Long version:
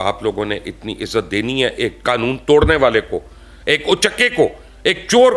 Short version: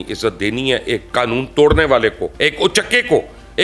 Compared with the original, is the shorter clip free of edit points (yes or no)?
no